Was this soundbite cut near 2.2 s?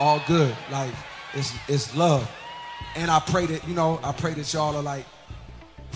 no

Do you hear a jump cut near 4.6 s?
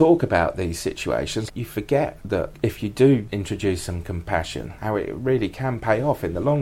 no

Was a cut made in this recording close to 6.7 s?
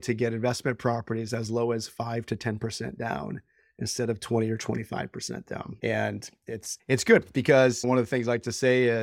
yes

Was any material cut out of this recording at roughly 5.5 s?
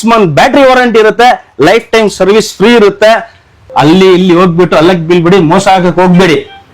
no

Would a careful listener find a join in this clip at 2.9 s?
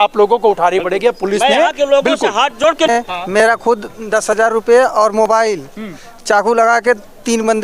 yes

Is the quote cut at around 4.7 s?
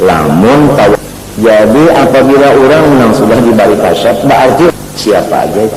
yes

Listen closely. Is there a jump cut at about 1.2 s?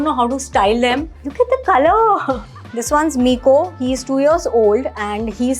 yes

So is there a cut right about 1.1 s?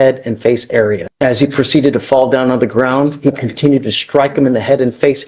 yes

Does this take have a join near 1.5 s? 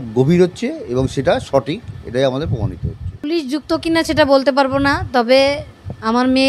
no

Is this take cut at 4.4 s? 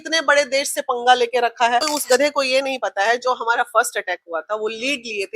no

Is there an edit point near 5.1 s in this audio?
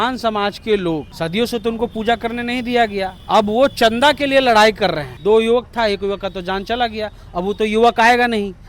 yes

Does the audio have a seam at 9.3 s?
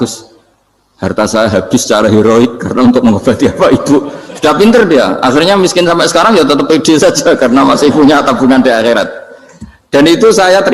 no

